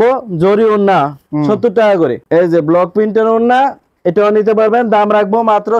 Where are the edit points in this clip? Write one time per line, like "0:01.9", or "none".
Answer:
0:02.2